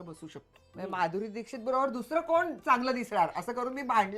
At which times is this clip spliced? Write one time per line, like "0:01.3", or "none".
0:00.9